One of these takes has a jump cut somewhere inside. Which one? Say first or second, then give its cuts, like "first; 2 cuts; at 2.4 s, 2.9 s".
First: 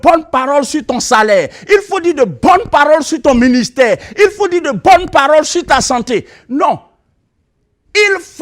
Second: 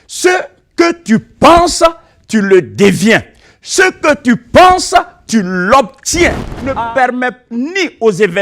second; 1 cut; at 6.5 s